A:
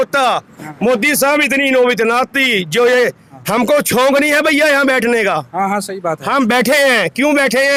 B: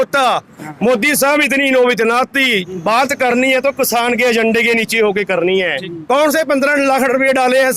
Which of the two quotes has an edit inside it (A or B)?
B